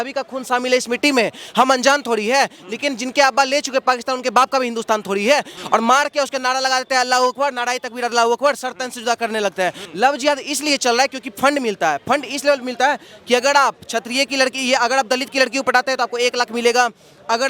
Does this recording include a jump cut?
yes; 2 cuts; at 5.6 s, 9.8 s

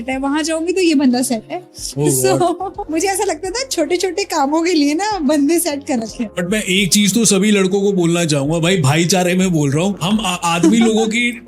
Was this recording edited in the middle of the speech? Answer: yes; 3 cuts; at 2.8 s, 6.4 s, 10.0 s

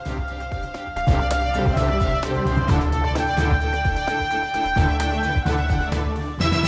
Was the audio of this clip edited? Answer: no; 0 cuts

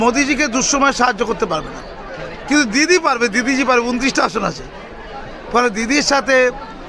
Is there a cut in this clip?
no; 0 cuts

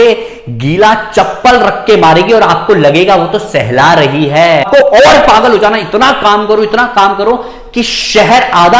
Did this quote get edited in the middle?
yes; 1 cut; at 4.7 s

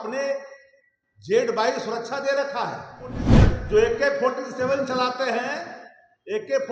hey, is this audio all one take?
no; 1 cut; at 3.3 s

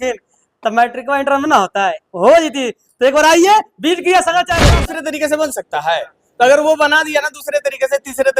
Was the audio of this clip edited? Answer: yes; 1 cut; at 4.7 s

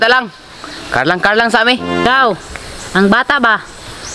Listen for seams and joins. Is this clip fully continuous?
no; 1 cut; at 2.1 s

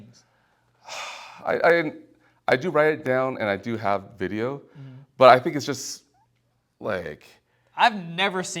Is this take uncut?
yes; 0 cuts

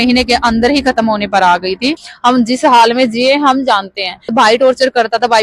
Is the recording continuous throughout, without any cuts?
no; 2 cuts; at 2.1 s, 4.3 s

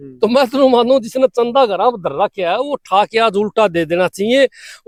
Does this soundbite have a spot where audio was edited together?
no; 0 cuts

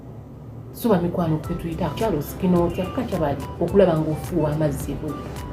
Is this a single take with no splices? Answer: no; 1 cut; at 2.0 s

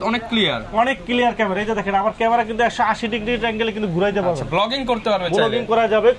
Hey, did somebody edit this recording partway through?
no; 0 cuts

